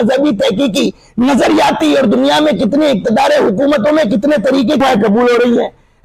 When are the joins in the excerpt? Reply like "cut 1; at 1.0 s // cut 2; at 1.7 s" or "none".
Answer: cut 1; at 4.8 s